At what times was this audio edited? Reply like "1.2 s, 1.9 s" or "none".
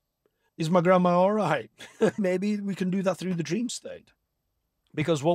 2.2 s